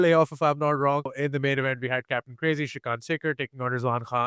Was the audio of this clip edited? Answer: yes; 1 cut; at 1.1 s

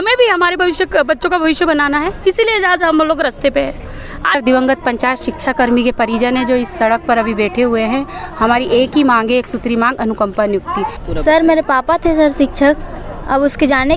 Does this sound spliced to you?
yes; 2 cuts; at 4.4 s, 11.0 s

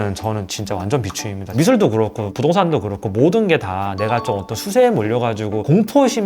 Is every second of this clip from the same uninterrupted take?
no; 1 cut; at 1.4 s

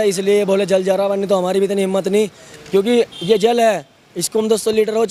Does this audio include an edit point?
no; 0 cuts

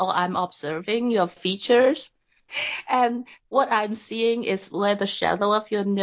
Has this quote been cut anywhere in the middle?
yes; 1 cut; at 2.5 s

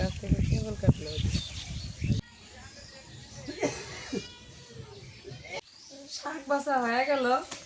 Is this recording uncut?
no; 2 cuts; at 2.2 s, 5.6 s

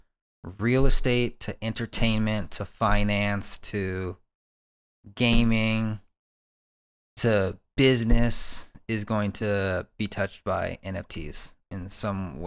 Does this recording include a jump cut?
no; 0 cuts

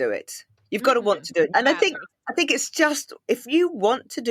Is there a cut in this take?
yes; 1 cut; at 1.5 s

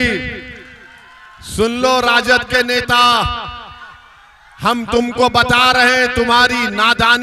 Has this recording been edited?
no; 0 cuts

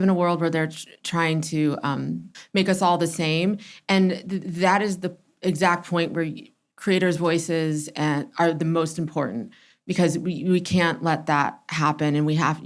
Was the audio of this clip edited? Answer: no; 0 cuts

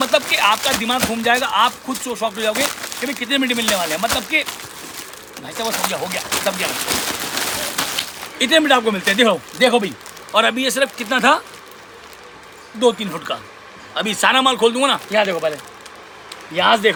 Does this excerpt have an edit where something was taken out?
no; 0 cuts

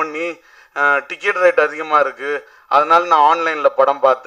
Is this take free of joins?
yes; 0 cuts

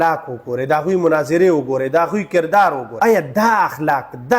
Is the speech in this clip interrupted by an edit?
yes; 1 cut; at 2.9 s

